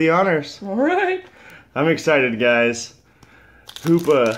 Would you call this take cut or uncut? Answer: cut